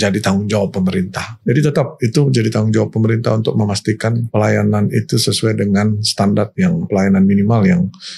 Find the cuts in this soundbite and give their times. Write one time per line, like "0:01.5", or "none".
0:01.3
0:04.3
0:06.9